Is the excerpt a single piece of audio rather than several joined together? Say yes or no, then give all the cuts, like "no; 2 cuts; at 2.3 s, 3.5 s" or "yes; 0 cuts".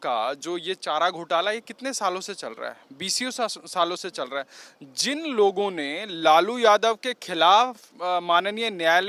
yes; 0 cuts